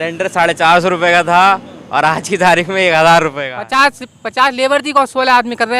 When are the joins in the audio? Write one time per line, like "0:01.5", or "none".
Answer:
0:03.5